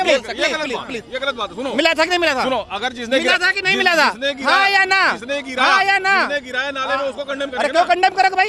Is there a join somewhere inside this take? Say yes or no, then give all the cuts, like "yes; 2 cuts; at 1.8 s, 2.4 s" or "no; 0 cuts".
no; 0 cuts